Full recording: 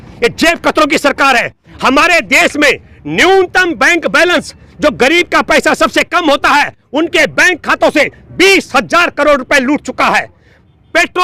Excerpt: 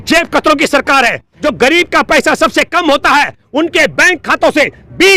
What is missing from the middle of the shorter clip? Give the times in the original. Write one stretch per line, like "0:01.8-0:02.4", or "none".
0:01.6-0:04.6